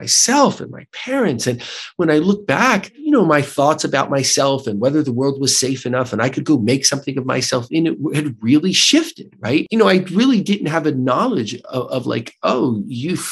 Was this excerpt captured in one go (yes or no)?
no